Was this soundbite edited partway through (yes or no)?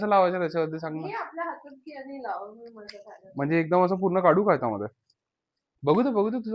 no